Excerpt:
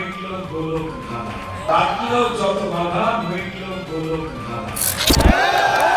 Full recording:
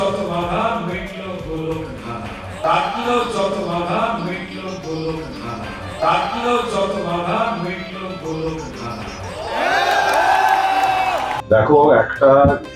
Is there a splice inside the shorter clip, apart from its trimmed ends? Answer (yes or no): yes